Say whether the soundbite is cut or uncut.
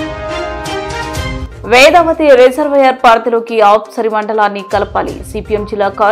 cut